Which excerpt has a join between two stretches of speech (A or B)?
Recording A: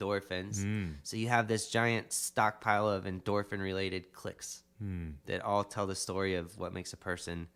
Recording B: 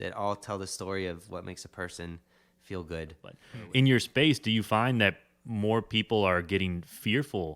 B